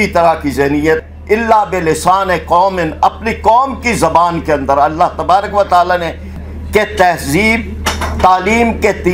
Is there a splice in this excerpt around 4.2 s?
no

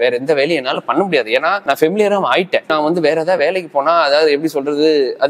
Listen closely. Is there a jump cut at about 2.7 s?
yes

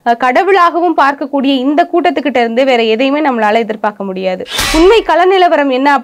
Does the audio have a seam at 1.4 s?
no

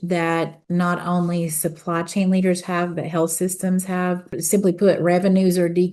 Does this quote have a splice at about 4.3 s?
yes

